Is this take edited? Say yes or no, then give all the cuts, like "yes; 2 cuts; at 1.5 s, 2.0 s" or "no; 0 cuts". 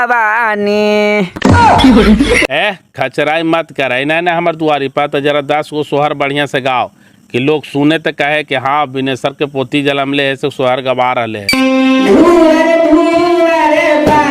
yes; 1 cut; at 11.4 s